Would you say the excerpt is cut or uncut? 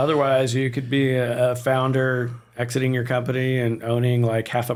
uncut